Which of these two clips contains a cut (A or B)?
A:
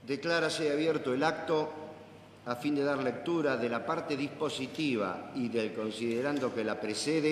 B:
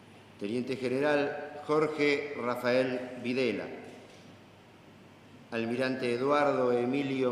B